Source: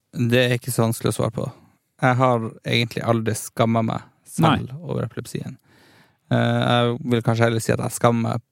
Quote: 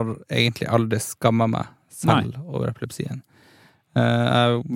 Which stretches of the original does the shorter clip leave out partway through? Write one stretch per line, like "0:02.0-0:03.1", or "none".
none